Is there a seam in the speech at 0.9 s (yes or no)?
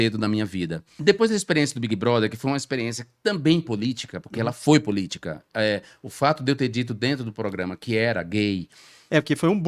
yes